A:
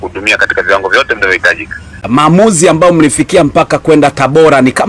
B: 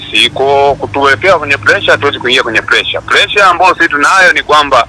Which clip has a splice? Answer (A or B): A